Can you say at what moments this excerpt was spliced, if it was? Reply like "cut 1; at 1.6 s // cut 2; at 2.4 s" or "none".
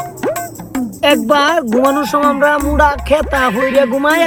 none